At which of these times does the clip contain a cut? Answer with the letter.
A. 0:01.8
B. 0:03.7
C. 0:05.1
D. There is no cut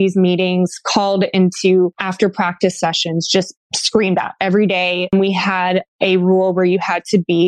C